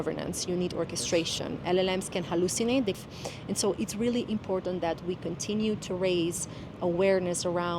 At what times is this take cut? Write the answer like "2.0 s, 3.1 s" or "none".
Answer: 3.0 s